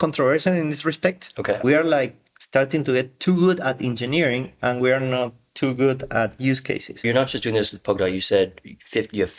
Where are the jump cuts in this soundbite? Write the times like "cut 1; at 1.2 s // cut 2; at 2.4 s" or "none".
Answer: cut 1; at 1.6 s // cut 2; at 7.0 s